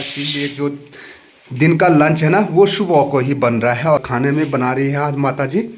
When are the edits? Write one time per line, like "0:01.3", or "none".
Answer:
0:04.0